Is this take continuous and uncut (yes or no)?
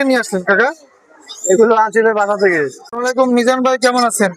no